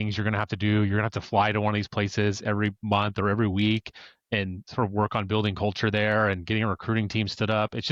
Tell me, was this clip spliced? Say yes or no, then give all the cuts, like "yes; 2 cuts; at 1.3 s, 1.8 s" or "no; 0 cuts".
no; 0 cuts